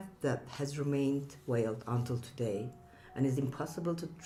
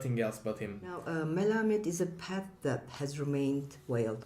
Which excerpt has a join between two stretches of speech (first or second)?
second